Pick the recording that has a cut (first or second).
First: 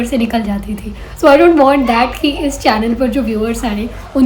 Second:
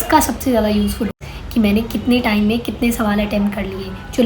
second